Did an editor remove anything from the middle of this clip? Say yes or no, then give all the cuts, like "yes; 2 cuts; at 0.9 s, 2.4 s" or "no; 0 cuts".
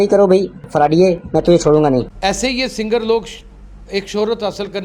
yes; 1 cut; at 2.1 s